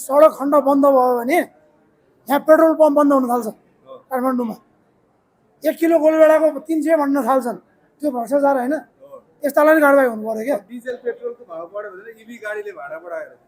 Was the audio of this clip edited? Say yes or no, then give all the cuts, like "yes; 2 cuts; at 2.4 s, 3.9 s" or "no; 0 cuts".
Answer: no; 0 cuts